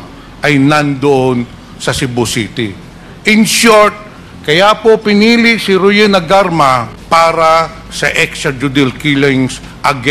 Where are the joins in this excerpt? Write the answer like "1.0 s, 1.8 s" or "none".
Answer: 6.9 s